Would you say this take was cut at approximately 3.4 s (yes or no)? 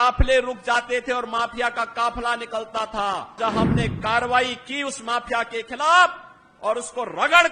yes